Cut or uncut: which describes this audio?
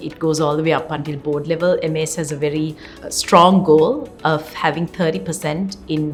uncut